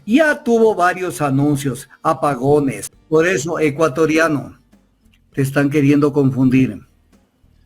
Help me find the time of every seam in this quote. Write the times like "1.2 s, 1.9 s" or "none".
2.9 s